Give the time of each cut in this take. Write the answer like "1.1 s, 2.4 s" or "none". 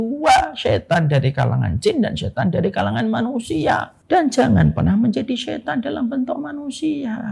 3.9 s